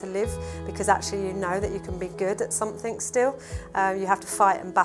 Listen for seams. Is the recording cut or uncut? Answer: uncut